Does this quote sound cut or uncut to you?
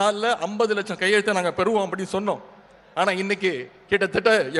uncut